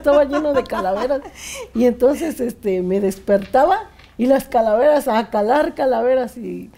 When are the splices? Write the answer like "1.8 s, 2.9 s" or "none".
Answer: none

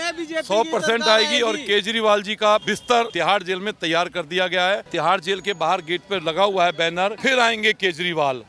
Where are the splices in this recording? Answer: 2.8 s, 4.9 s, 7.2 s

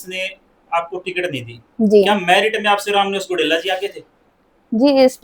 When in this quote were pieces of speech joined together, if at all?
none

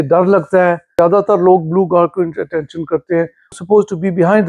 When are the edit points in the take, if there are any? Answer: 0.9 s, 3.6 s

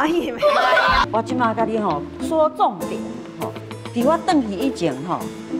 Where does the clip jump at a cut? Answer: 1.0 s

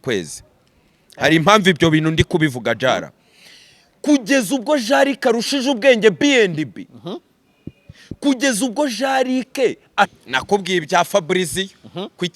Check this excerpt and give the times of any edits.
10.2 s

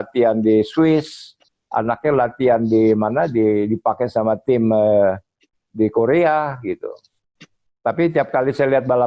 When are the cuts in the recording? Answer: none

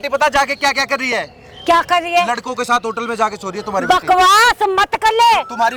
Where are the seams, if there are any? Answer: none

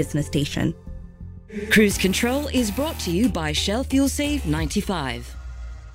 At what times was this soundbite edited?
0.9 s

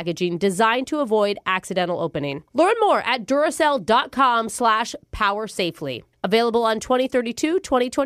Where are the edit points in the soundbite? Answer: none

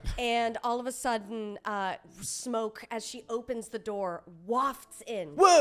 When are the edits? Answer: none

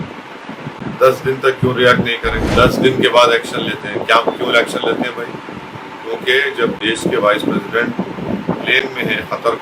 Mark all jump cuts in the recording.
2.5 s

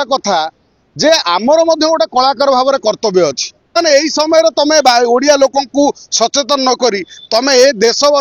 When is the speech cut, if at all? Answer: 3.8 s

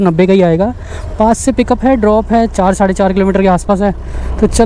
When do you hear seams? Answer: none

